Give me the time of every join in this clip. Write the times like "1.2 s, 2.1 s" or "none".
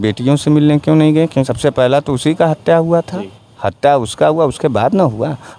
1.5 s